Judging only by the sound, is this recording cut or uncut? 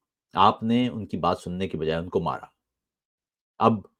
uncut